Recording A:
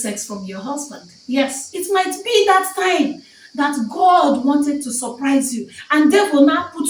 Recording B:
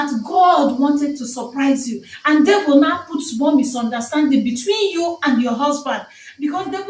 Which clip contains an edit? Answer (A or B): A